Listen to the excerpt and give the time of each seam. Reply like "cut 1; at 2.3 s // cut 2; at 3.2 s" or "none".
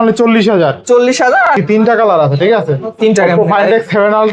cut 1; at 1.6 s